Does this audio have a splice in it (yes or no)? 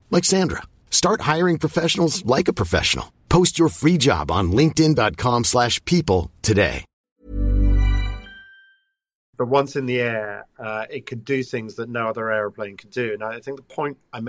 yes